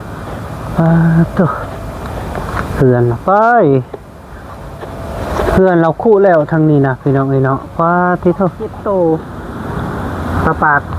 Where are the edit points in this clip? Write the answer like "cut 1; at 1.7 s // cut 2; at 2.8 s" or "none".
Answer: cut 1; at 8.8 s